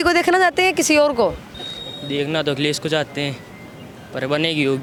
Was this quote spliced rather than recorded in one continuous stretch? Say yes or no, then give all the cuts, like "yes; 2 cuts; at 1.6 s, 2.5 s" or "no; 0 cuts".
no; 0 cuts